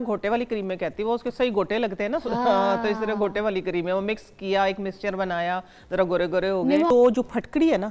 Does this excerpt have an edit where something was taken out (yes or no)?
yes